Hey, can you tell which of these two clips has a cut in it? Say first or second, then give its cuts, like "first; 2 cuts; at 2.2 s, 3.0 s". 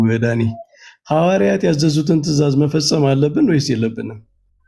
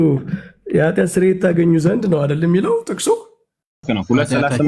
second; 1 cut; at 3.8 s